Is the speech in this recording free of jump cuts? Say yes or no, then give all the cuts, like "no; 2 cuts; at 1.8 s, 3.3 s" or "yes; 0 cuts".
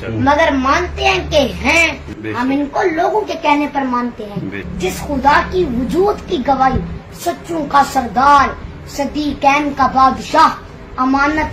no; 2 cuts; at 2.0 s, 4.6 s